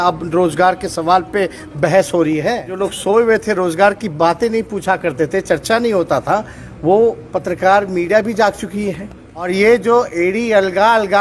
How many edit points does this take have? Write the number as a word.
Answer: two